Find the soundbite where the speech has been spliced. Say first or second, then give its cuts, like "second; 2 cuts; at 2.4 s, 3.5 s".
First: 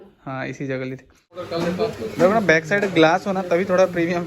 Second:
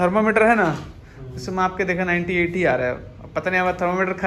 first; 1 cut; at 1.4 s